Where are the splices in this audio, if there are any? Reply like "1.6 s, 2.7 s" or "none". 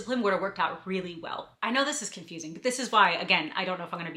1.5 s